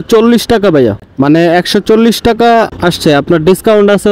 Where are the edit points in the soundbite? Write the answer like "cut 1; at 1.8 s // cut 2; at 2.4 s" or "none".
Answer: cut 1; at 1.0 s // cut 2; at 2.7 s